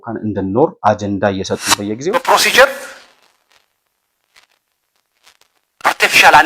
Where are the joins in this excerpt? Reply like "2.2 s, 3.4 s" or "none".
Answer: 2.0 s